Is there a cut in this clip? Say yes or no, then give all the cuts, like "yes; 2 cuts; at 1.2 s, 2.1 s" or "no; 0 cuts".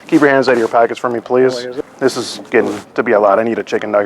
yes; 1 cut; at 1.7 s